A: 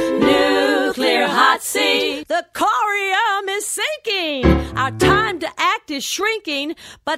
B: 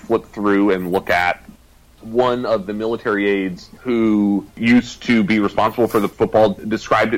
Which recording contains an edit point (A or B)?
B